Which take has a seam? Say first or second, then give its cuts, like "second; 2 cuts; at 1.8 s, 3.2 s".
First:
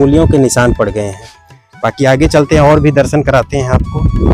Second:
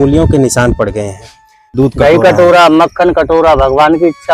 second; 1 cut; at 1.7 s